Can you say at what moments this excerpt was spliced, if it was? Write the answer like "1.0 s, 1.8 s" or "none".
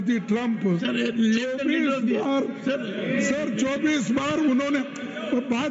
none